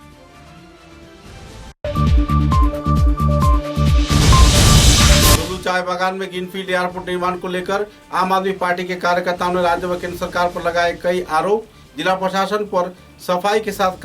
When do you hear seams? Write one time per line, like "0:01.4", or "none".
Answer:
0:01.8
0:05.4